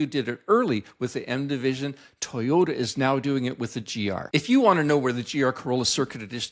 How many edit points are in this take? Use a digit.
1